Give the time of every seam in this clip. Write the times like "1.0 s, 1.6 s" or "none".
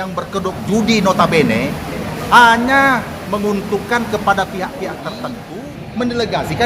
5.4 s

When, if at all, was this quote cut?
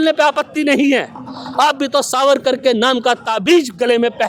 none

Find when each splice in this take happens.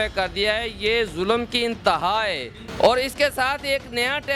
2.6 s

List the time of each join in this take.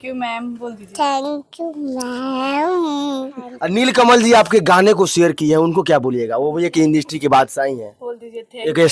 3.4 s

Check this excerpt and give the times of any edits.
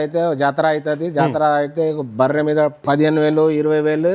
2.8 s

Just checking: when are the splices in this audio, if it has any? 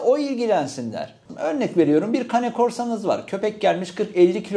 1.2 s

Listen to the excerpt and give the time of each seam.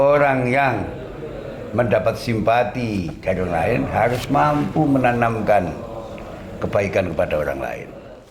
none

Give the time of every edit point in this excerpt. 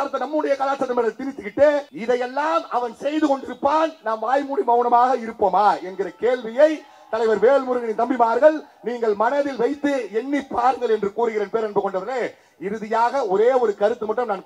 1.9 s

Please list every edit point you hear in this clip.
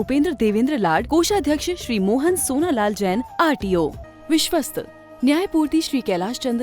4.0 s

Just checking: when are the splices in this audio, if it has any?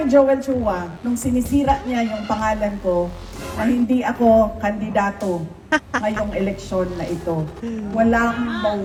none

